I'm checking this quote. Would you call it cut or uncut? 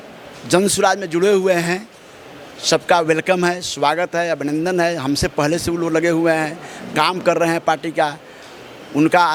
uncut